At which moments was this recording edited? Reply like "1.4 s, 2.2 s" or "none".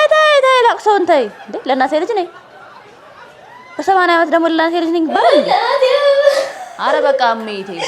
none